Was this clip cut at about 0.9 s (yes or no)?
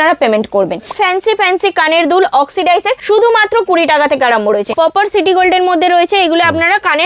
yes